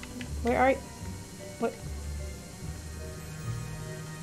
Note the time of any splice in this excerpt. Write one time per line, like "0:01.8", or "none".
none